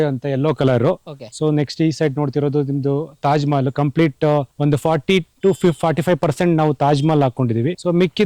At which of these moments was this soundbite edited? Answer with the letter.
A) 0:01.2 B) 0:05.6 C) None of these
C